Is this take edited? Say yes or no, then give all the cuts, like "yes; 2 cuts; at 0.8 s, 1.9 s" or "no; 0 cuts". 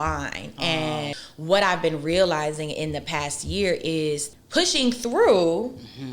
yes; 2 cuts; at 1.3 s, 4.3 s